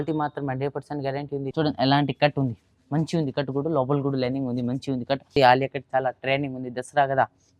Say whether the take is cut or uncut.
cut